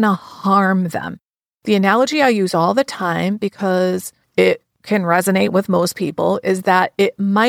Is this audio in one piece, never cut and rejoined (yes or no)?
no